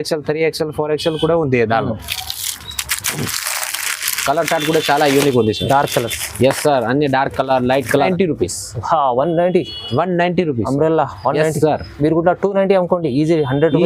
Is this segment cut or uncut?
cut